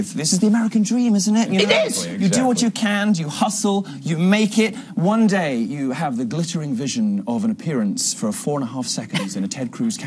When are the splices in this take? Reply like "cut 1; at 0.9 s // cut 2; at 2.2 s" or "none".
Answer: cut 1; at 8.1 s